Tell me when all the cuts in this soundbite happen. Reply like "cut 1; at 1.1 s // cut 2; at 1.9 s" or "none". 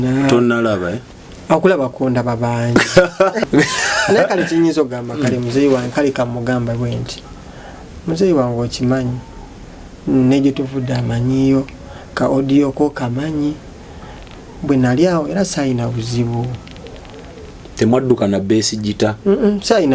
cut 1; at 3.4 s